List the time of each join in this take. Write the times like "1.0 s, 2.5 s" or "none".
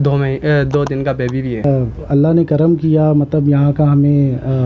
1.6 s